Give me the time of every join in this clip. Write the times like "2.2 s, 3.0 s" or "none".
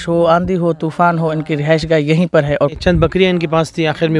2.8 s